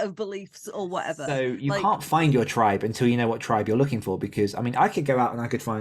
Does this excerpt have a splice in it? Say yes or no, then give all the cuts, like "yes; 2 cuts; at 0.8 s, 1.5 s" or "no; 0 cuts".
yes; 1 cut; at 1.2 s